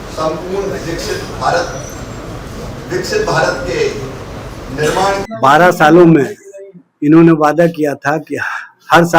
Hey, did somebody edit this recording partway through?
yes; 1 cut; at 5.2 s

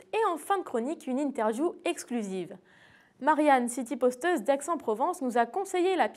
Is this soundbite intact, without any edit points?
yes; 0 cuts

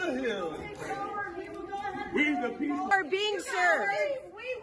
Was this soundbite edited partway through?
yes; 1 cut; at 2.9 s

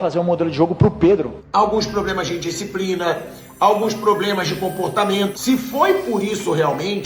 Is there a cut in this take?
yes; 2 cuts; at 1.4 s, 5.3 s

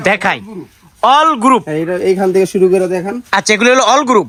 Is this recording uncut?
yes; 0 cuts

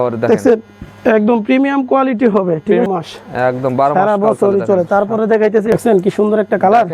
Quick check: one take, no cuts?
no; 2 cuts; at 2.9 s, 5.7 s

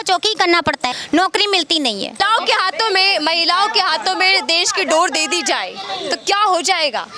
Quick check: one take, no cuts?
no; 2 cuts; at 1.0 s, 2.1 s

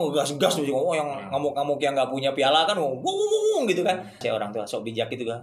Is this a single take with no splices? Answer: no; 1 cut; at 4.2 s

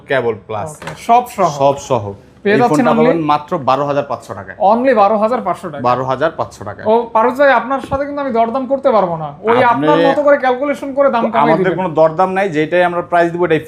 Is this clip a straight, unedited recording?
yes; 0 cuts

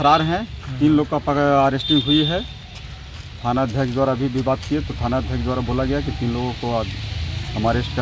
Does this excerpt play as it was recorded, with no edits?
yes; 0 cuts

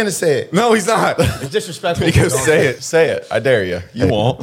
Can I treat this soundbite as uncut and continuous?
no; 2 cuts; at 1.4 s, 2.8 s

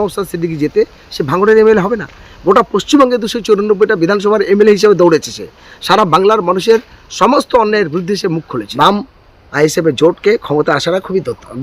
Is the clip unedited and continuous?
no; 1 cut; at 8.6 s

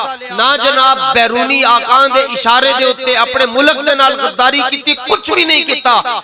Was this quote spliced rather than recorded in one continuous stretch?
no; 0 cuts

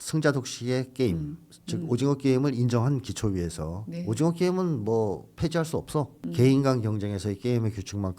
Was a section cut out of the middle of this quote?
yes; 1 cut; at 6.2 s

